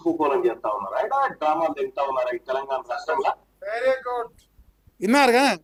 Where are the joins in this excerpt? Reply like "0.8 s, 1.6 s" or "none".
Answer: none

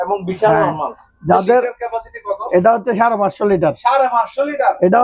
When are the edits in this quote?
none

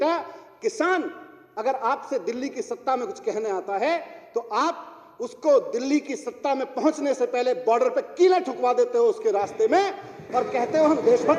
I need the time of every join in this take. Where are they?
none

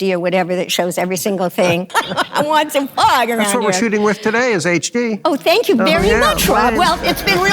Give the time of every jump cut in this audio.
1.9 s

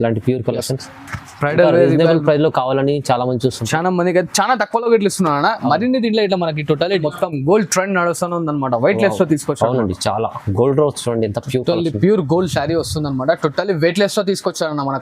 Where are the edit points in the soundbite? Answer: 7.0 s

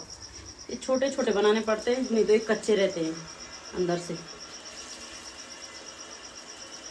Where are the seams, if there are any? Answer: none

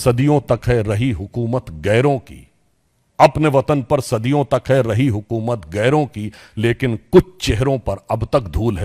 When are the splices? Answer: none

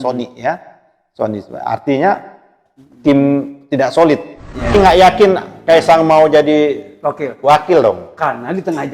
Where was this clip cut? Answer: 4.7 s

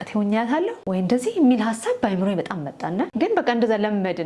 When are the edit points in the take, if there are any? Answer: 0.8 s, 3.1 s

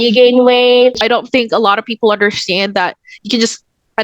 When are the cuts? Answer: 1.0 s

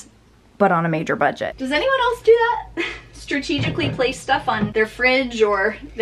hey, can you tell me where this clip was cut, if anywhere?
1.5 s, 4.7 s

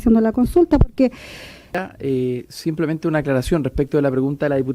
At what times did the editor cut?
1.7 s

